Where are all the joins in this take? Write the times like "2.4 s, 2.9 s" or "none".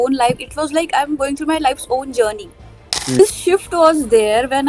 3.2 s

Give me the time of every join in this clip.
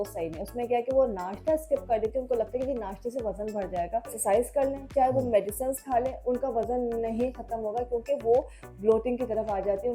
4.2 s

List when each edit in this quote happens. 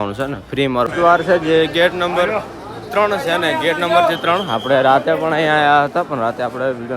0.9 s

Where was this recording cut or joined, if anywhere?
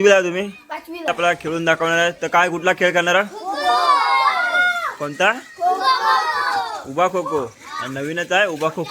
1.1 s

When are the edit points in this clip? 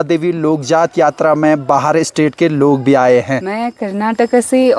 3.4 s

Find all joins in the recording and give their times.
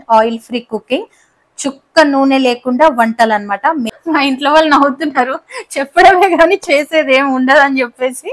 4.0 s

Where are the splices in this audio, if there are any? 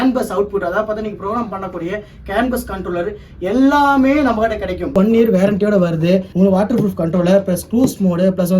4.9 s, 6.3 s

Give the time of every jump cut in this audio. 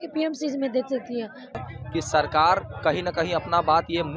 1.6 s

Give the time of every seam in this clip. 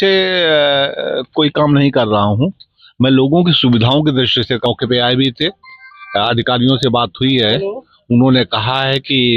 4.6 s

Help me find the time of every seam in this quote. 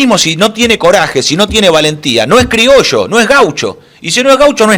none

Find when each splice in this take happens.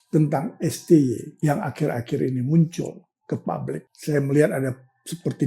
1.3 s, 3.9 s

